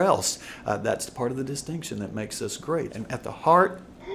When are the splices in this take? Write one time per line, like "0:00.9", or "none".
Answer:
0:02.9